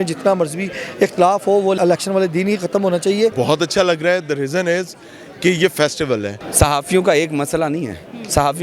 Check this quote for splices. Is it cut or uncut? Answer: cut